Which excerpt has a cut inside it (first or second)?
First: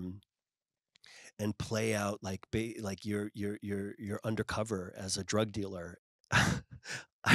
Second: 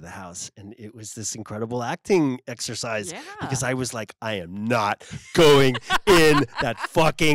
first